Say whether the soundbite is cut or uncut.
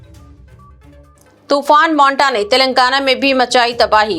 cut